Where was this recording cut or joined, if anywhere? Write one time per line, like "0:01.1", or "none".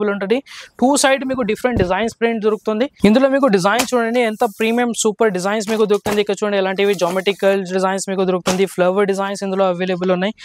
0:02.9